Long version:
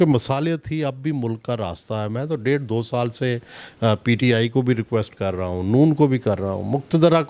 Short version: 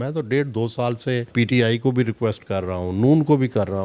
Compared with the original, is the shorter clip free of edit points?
no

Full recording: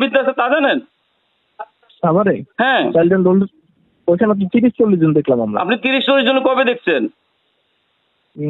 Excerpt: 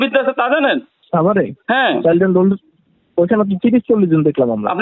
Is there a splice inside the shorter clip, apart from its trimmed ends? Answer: yes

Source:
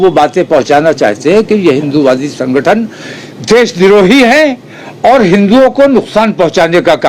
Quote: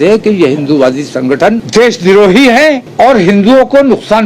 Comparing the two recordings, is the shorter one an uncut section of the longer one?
no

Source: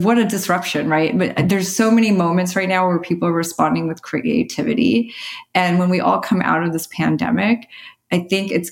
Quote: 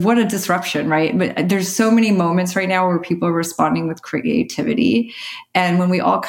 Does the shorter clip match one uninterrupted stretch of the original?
yes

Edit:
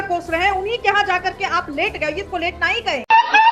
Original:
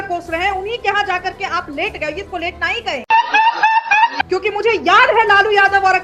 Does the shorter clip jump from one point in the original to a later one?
no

